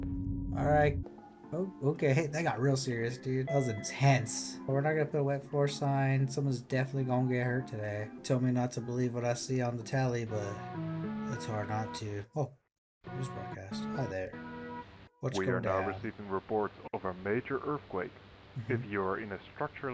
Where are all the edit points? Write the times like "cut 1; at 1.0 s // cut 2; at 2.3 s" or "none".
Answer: cut 1; at 3.5 s // cut 2; at 4.6 s // cut 3; at 8.1 s